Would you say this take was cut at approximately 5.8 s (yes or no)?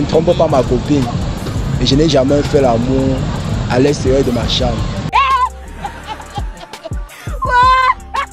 no